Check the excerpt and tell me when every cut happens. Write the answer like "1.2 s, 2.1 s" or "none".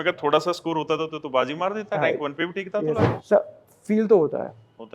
3.1 s